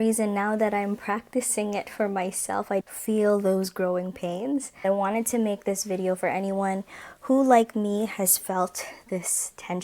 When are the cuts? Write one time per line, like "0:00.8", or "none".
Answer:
0:02.8
0:04.8